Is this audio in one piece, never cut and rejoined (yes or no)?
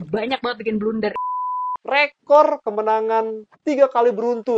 no